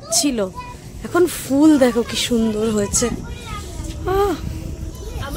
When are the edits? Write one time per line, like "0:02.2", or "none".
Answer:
none